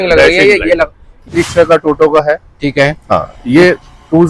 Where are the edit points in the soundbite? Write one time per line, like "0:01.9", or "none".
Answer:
0:01.3